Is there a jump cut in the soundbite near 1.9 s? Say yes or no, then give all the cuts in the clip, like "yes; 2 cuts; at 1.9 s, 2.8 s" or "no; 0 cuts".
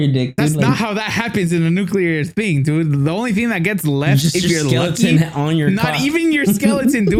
no; 0 cuts